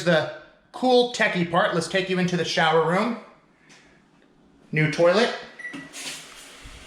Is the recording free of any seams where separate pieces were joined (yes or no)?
yes